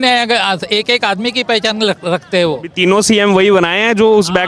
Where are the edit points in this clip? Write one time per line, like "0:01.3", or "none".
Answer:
none